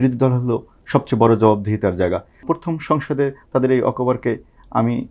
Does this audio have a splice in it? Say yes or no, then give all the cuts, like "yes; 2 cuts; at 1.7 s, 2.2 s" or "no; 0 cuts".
yes; 1 cut; at 2.4 s